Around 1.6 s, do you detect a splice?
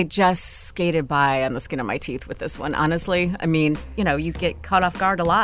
no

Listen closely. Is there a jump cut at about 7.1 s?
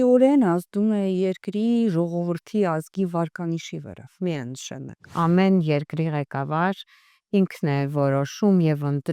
no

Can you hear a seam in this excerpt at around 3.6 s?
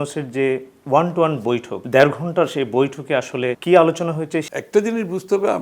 yes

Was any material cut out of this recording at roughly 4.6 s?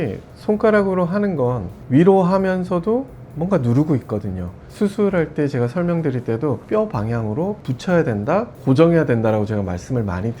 yes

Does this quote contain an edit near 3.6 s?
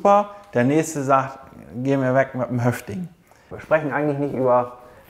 yes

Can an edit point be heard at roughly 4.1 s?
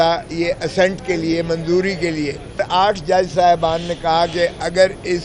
no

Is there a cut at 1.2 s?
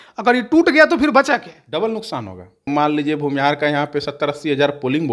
no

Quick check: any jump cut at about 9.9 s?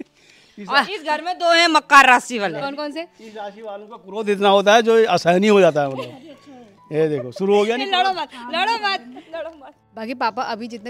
yes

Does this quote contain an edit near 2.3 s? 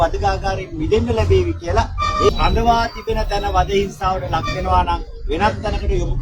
yes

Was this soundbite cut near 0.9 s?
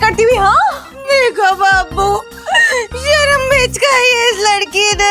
yes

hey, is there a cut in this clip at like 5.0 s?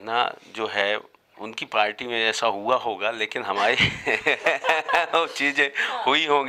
no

